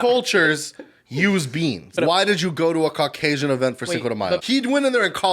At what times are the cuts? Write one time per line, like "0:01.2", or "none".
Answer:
0:01.9
0:04.4